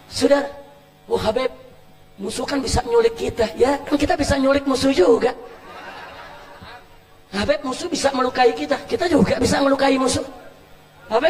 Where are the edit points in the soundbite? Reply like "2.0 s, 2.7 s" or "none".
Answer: none